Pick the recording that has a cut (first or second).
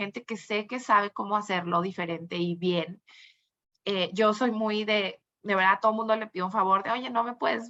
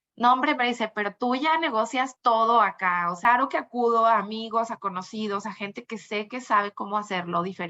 second